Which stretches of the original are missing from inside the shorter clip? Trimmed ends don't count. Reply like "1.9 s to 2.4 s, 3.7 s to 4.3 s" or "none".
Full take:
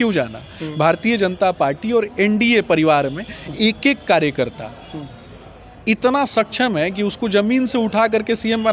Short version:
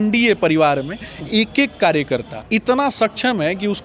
4.6 s to 5.7 s